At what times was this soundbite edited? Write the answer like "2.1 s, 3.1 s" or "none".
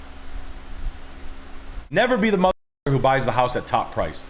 1.8 s